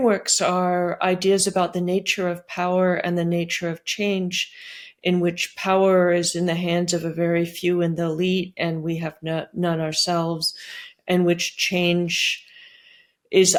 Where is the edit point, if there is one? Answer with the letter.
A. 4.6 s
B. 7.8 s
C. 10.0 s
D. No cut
D